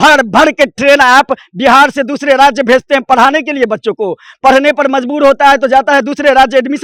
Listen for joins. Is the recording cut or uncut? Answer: uncut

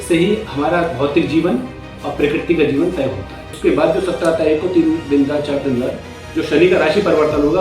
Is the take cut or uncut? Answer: cut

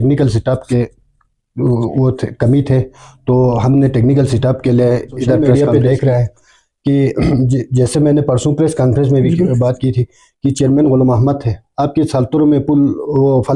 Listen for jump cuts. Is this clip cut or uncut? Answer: cut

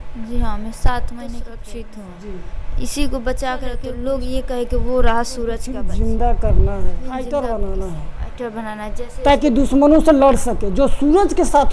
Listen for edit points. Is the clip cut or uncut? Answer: cut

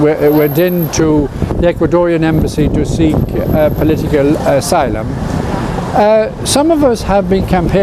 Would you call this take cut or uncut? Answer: cut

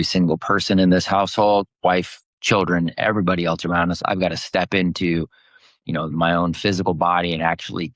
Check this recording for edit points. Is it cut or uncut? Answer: uncut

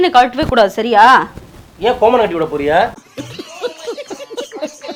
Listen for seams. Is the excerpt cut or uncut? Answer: uncut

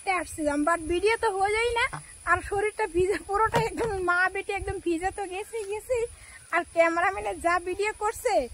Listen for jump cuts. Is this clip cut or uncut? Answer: uncut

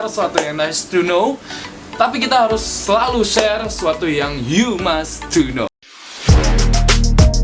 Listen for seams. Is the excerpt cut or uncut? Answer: cut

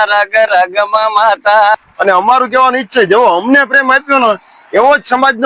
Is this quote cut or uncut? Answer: cut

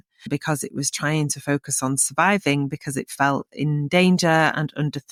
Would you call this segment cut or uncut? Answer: uncut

